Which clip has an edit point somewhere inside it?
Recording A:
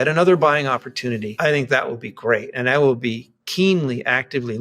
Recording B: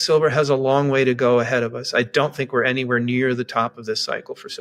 A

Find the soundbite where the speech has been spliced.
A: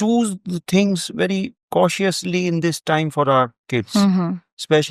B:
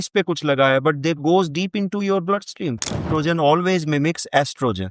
B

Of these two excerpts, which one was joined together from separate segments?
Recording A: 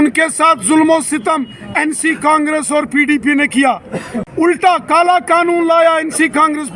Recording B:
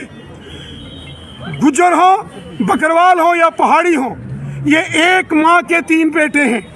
A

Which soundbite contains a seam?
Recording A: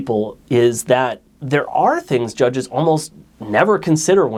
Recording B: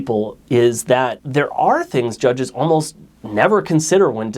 B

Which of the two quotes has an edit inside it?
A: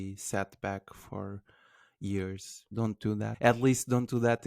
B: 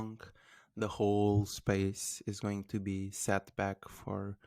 A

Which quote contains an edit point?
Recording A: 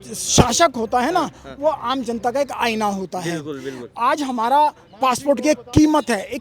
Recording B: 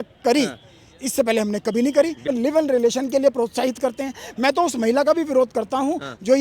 B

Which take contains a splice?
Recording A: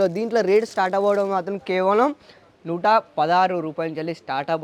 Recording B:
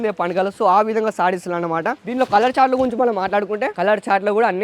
B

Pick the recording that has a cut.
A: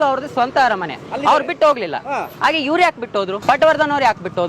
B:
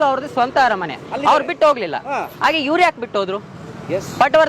A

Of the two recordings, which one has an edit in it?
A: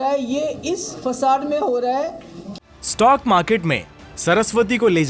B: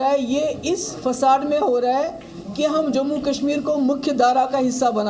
A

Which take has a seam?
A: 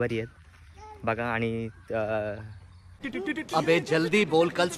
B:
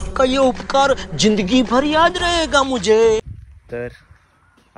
B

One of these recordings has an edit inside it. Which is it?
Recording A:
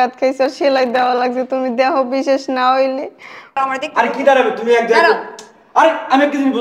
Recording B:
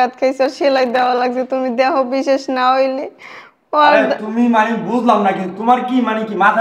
A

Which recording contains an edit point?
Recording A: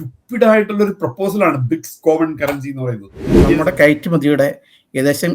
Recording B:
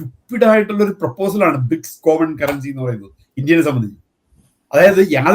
A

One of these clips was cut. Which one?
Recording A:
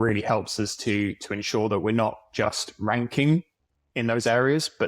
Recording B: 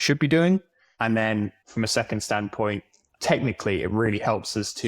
B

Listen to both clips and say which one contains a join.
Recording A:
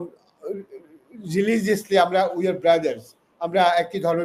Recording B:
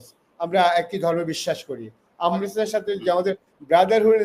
B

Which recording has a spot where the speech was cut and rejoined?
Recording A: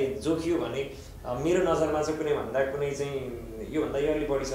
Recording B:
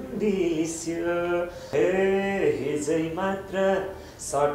B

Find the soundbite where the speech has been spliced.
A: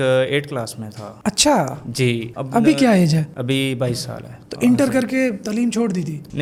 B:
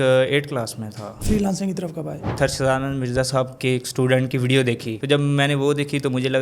B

